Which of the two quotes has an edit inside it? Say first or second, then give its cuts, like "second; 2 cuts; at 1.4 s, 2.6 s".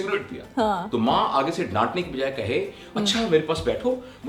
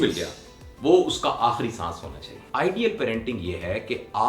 second; 1 cut; at 2.4 s